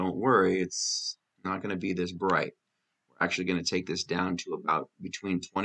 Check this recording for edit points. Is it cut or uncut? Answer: uncut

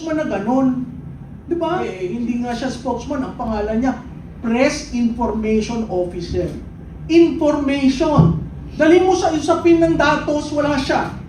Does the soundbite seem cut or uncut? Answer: cut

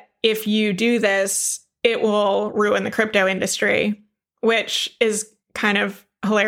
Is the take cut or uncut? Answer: uncut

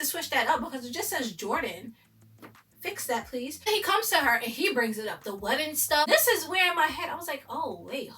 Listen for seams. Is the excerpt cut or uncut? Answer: uncut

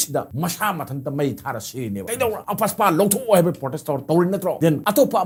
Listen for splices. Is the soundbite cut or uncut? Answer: uncut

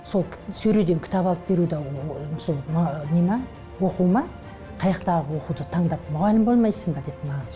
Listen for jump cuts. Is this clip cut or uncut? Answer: uncut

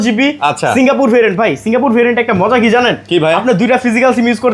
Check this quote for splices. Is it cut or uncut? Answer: uncut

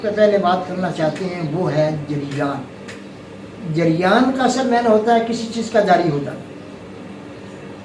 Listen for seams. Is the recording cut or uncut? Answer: uncut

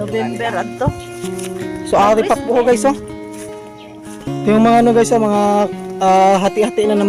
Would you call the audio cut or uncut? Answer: uncut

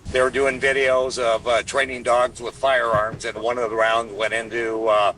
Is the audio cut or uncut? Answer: cut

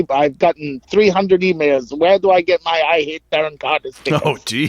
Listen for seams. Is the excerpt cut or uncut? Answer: uncut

